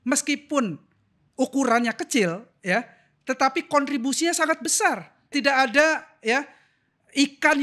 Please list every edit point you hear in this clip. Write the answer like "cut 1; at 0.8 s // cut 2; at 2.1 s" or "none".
cut 1; at 5.3 s